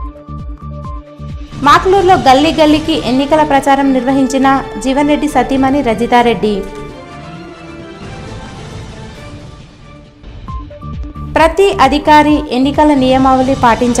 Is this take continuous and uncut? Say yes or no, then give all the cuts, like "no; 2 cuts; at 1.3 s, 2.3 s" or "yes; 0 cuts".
no; 1 cut; at 0.9 s